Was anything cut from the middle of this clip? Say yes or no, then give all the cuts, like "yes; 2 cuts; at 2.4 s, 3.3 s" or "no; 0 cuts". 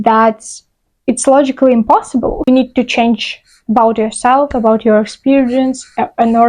yes; 1 cut; at 2.5 s